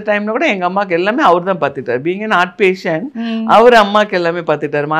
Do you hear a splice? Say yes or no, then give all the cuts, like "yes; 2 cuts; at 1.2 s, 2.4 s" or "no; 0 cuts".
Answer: no; 0 cuts